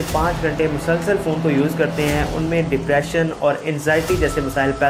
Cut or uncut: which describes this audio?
uncut